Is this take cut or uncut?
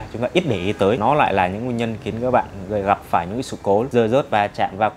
cut